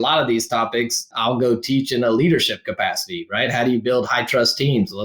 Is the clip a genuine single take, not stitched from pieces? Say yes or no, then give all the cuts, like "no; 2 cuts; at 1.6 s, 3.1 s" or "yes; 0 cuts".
no; 1 cut; at 1.1 s